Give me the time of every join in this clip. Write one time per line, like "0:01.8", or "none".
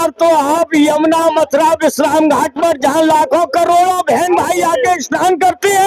none